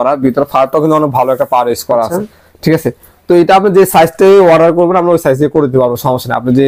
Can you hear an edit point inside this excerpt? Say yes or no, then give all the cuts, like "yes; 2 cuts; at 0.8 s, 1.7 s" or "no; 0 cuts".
no; 0 cuts